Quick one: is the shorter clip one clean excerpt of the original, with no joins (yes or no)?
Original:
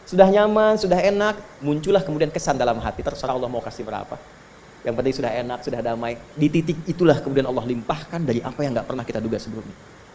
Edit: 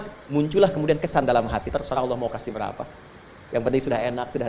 yes